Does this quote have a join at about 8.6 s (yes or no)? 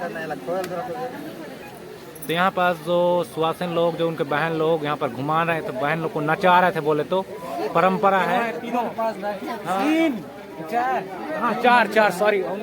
yes